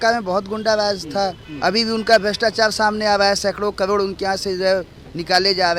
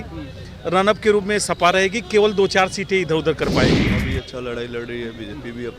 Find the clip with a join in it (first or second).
second